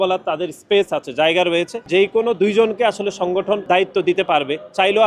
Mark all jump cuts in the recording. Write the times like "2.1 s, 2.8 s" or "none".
1.8 s, 3.6 s